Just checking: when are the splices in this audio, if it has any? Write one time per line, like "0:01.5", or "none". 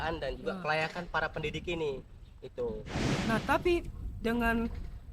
0:03.1